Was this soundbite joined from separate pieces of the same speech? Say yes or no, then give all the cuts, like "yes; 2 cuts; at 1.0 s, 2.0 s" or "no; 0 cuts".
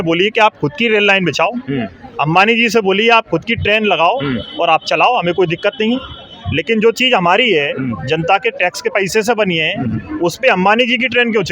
no; 0 cuts